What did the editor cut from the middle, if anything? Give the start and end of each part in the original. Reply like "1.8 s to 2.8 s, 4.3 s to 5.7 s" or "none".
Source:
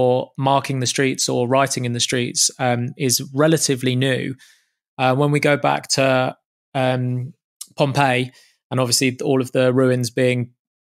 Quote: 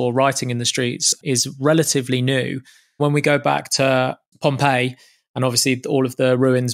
2.5 s to 2.9 s, 4.7 s to 5.2 s, 6.4 s to 7.6 s